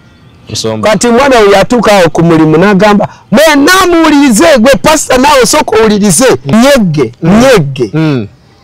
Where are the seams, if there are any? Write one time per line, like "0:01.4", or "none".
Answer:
0:06.5